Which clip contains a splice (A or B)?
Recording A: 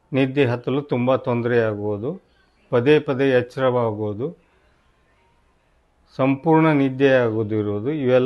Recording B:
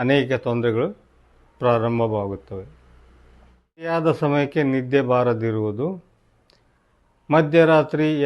B